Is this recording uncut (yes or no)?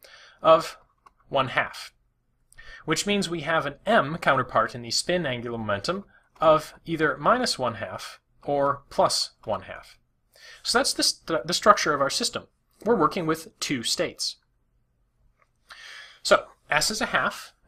yes